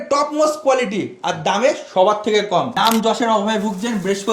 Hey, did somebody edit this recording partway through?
yes; 1 cut; at 2.7 s

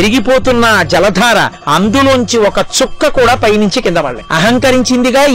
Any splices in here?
yes; 2 cuts; at 1.6 s, 4.2 s

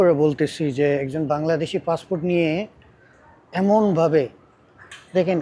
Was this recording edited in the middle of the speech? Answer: no; 0 cuts

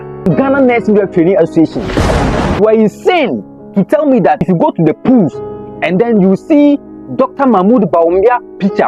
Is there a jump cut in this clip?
yes; 2 cuts; at 2.5 s, 4.4 s

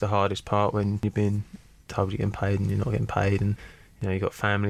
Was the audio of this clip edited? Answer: yes; 1 cut; at 1.3 s

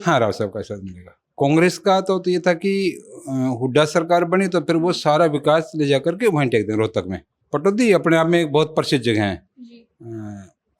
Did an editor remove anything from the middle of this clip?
yes; 2 cuts; at 1.3 s, 7.3 s

